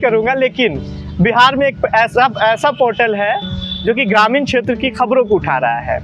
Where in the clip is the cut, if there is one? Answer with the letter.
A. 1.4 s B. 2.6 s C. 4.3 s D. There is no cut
D